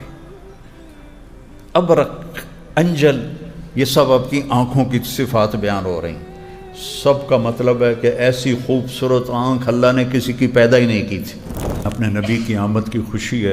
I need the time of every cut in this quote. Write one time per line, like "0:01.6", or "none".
0:11.9